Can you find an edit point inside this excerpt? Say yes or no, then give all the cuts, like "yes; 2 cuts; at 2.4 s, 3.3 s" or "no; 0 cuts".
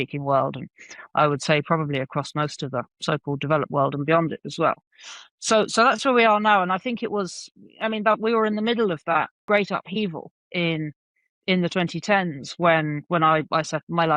yes; 1 cut; at 9.4 s